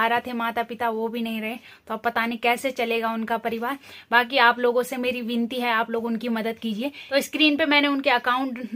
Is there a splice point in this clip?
no; 0 cuts

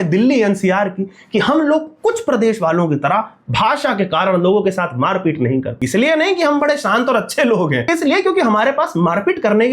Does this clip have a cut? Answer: yes; 2 cuts; at 5.8 s, 7.9 s

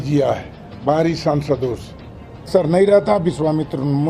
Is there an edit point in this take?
yes; 1 cut; at 2.5 s

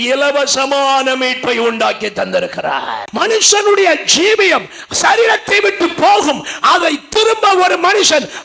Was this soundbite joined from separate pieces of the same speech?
yes; 1 cut; at 3.0 s

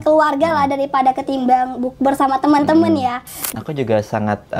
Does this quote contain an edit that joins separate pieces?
yes; 1 cut; at 3.5 s

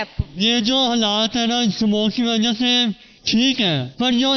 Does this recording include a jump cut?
no; 0 cuts

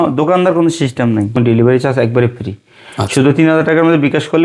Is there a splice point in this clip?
yes; 1 cut; at 1.4 s

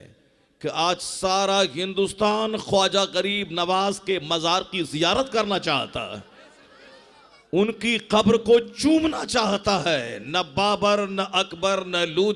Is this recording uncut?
yes; 0 cuts

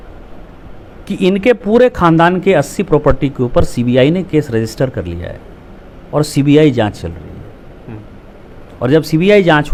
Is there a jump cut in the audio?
no; 0 cuts

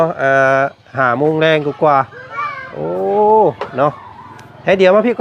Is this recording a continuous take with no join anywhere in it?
yes; 0 cuts

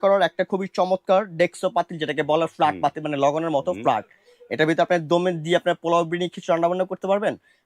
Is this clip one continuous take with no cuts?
yes; 0 cuts

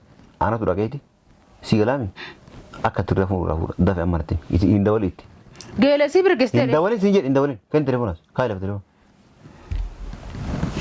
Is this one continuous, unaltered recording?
yes; 0 cuts

